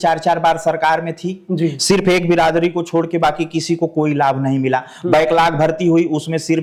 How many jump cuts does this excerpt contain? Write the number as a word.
zero